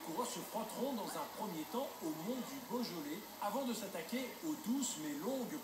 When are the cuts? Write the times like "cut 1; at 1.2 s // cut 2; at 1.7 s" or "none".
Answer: cut 1; at 1.0 s